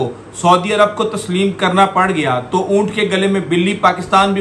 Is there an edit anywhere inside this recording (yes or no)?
no